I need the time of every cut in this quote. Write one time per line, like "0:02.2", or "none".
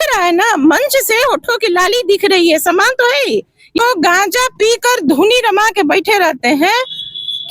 0:03.8